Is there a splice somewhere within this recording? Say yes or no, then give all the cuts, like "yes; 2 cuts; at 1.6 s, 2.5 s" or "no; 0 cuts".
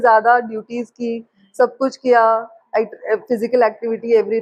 no; 0 cuts